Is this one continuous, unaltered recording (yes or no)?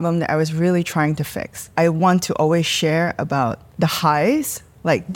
no